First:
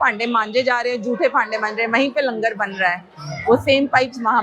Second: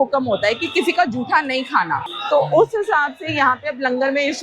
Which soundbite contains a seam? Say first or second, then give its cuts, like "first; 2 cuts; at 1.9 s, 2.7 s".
second; 1 cut; at 2.1 s